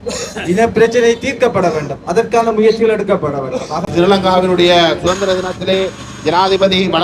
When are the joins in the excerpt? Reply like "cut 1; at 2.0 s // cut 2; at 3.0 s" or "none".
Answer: cut 1; at 3.9 s